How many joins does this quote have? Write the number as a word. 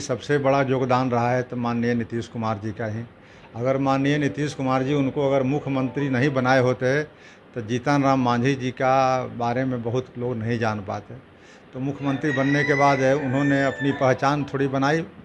zero